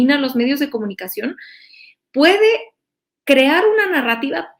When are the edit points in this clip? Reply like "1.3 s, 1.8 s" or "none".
none